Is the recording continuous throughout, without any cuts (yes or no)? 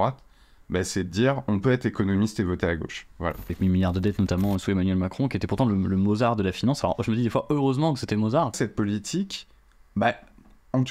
no